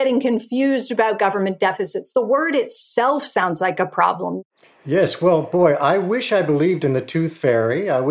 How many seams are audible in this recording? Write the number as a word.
one